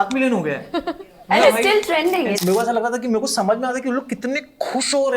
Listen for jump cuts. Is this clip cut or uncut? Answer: cut